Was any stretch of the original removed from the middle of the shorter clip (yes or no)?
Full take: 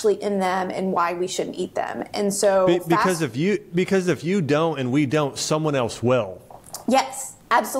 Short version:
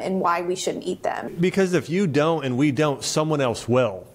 yes